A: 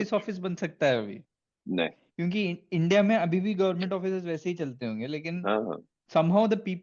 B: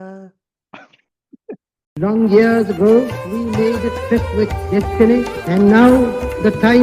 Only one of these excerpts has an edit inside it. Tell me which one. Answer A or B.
B